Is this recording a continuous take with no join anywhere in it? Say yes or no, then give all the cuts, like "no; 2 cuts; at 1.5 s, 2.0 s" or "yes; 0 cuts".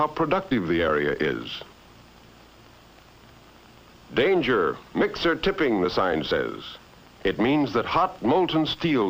no; 1 cut; at 1.2 s